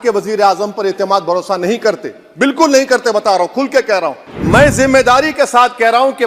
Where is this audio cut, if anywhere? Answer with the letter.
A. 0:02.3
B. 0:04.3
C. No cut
B